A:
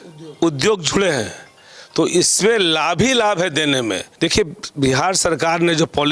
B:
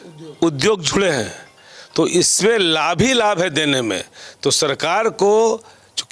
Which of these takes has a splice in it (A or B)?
A